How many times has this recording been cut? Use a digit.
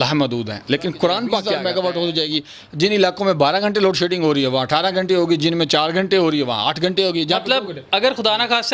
1